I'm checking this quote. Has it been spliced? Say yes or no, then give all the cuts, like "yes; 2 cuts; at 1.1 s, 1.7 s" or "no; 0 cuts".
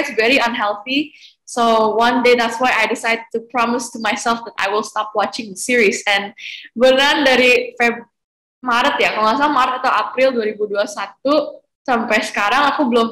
no; 0 cuts